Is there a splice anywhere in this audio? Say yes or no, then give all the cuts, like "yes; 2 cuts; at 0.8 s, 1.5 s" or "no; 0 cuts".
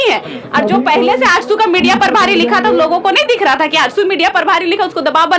no; 0 cuts